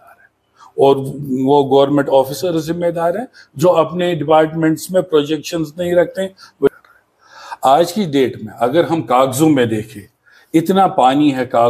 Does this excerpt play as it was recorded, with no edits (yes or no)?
no